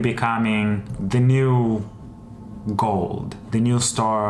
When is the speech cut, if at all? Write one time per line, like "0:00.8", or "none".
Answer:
0:00.9